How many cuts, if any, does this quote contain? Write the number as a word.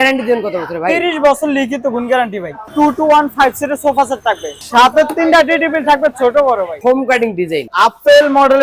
three